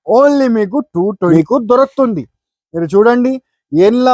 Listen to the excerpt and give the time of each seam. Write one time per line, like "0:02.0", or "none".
0:01.3